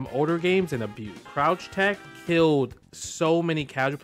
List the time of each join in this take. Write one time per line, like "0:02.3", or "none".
0:01.2

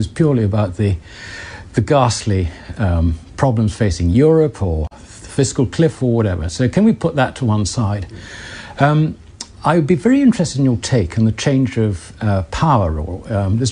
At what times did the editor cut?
0:08.8

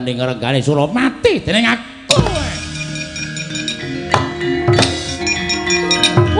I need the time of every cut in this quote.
0:05.2

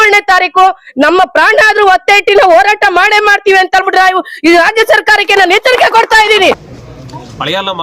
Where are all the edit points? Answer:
0:06.7

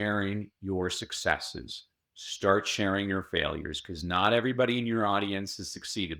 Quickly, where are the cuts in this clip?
none

